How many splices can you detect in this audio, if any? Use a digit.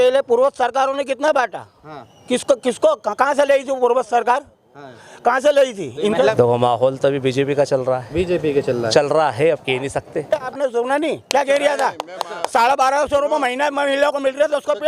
2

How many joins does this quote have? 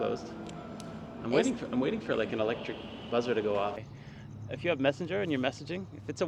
1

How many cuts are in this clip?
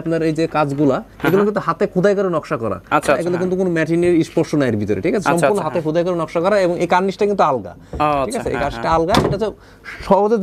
0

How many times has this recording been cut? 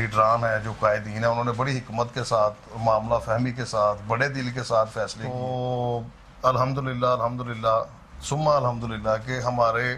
1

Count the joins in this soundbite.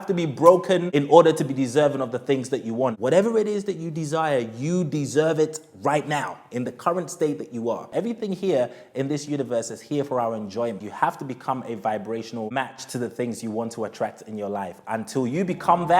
5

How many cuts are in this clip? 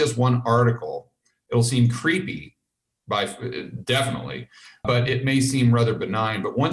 2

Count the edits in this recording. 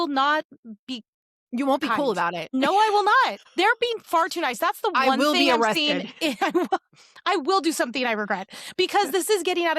2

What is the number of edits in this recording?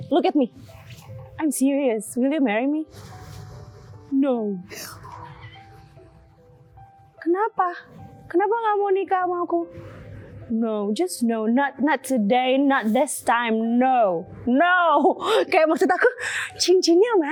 0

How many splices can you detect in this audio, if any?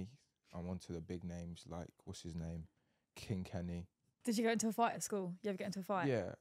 1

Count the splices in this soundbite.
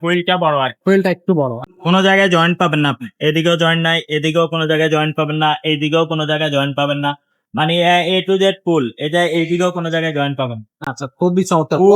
1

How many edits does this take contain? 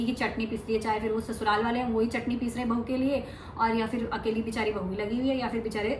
0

